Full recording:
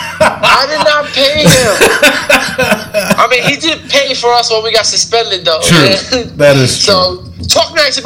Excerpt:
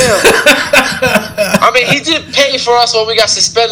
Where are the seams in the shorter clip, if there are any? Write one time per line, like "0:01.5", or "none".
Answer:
none